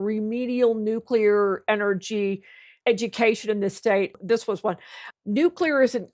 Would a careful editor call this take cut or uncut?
cut